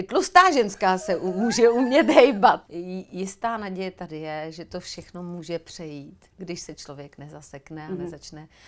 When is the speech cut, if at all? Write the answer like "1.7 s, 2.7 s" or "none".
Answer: 2.7 s